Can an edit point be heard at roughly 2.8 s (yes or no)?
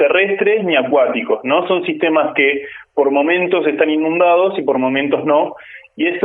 no